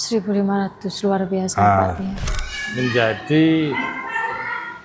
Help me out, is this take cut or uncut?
cut